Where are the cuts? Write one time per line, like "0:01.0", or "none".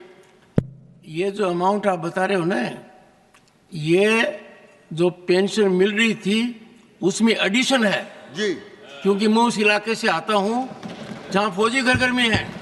none